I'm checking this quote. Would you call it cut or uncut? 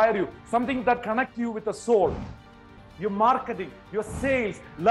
cut